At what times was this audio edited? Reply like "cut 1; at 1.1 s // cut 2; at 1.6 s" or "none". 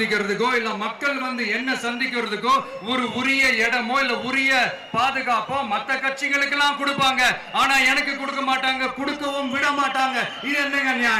none